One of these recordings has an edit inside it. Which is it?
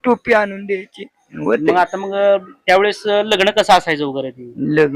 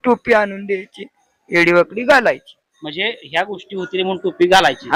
first; 1 cut; at 1.3 s

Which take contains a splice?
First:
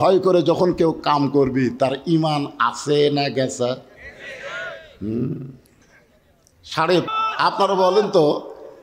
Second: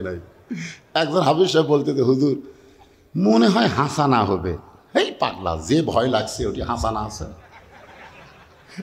first; 1 cut; at 7.1 s

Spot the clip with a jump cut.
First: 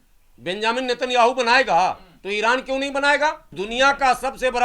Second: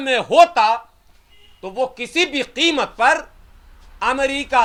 first; 1 cut; at 3.5 s

